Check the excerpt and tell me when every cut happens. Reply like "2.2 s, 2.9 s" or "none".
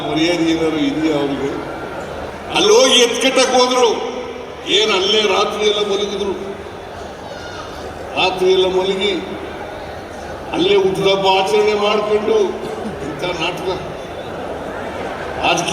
2.3 s